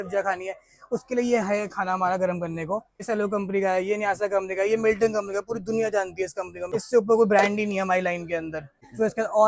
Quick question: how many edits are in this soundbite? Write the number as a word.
three